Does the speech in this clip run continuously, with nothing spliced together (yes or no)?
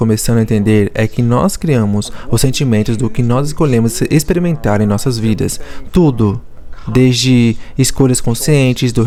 yes